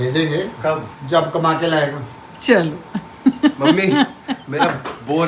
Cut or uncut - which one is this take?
cut